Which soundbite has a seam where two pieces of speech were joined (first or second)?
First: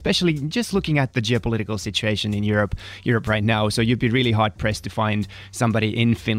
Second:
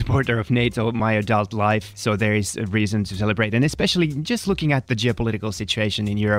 second